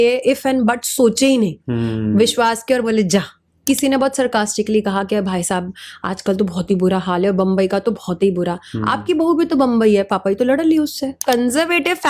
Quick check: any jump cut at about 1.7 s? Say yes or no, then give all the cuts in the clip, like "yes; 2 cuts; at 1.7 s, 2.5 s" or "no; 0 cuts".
no; 2 cuts; at 3.6 s, 11.2 s